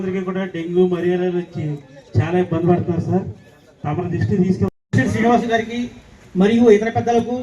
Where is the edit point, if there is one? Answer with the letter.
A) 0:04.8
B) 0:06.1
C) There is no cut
A